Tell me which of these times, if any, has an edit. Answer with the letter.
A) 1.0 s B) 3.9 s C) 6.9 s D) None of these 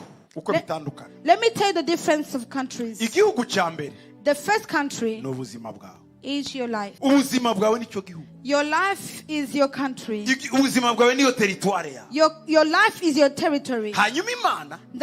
C